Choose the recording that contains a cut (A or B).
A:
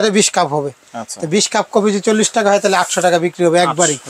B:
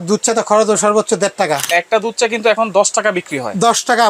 B